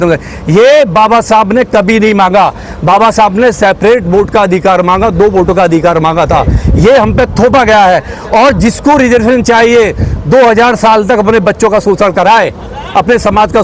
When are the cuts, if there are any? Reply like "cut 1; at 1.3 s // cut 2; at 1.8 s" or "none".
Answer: none